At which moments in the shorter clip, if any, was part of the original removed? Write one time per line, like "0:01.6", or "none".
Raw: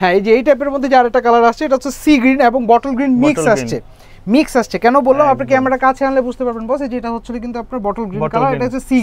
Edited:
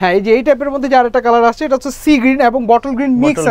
none